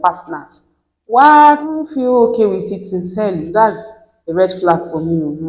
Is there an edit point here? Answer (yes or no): yes